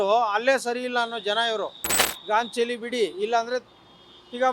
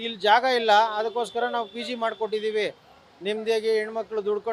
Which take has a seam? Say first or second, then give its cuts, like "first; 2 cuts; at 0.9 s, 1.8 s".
first; 1 cut; at 2.1 s